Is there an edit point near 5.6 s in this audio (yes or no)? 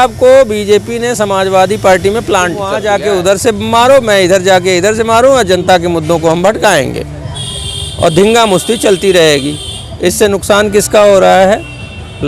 no